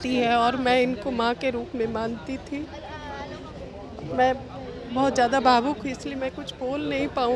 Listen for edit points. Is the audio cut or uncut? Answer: uncut